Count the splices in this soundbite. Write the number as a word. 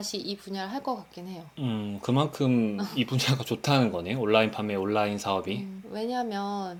zero